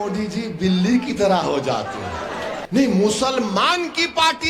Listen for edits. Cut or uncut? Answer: cut